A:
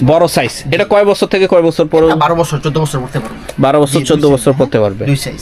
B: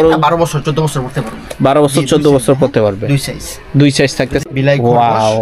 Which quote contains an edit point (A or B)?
B